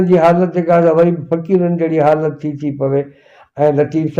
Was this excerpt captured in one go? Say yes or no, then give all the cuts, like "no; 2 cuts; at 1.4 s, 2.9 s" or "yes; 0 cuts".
yes; 0 cuts